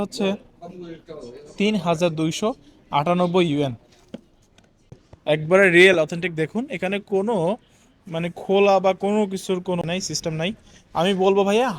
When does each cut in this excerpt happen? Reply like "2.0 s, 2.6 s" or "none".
5.1 s, 9.8 s